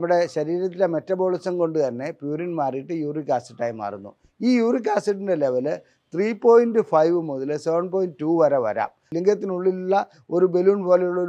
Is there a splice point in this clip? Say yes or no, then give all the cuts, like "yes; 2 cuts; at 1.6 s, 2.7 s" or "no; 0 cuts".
yes; 1 cut; at 9.0 s